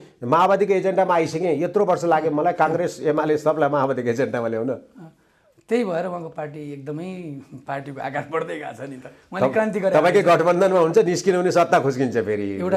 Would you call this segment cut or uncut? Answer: uncut